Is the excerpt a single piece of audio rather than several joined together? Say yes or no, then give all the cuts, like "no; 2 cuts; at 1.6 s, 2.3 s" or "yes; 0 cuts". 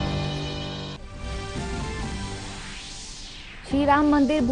no; 1 cut; at 1.0 s